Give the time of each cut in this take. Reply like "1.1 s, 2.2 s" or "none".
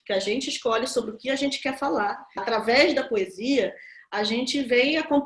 2.4 s

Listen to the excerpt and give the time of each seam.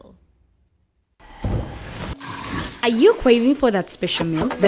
1.0 s

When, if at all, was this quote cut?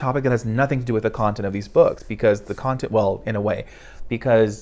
none

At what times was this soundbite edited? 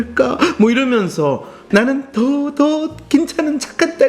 1.6 s

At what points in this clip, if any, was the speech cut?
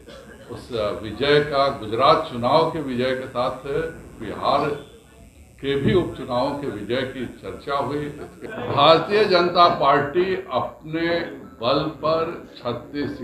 8.4 s

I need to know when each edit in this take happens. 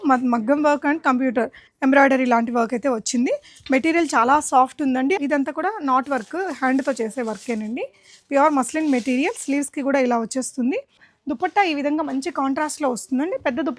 5.2 s, 11.0 s

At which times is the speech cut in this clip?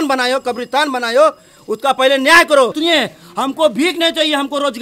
2.7 s

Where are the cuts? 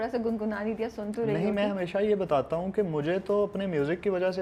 none

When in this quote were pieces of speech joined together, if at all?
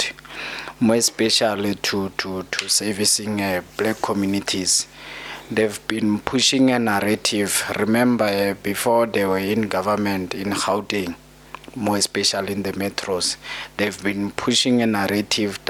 none

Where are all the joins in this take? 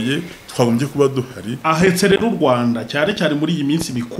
1.4 s

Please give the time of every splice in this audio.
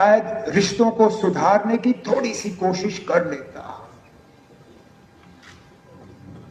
none

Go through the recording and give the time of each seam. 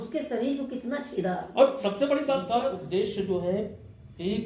2.5 s

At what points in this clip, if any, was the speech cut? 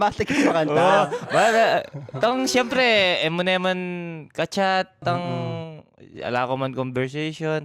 none

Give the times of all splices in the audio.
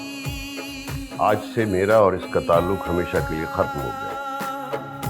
1.0 s

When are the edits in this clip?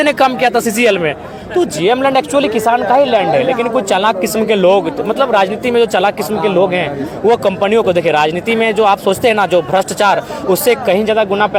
none

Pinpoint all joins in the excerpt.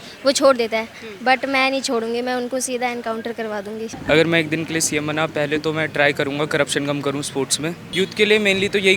3.9 s, 7.8 s

